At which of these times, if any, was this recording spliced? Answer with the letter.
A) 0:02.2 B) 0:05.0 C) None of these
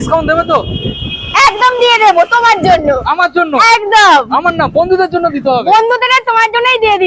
C